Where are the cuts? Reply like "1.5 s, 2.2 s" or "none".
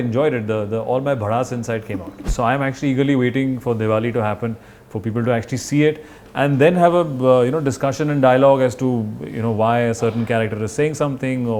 2.2 s